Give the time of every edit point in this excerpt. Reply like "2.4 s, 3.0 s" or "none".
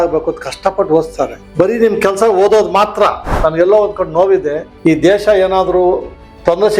1.4 s, 3.3 s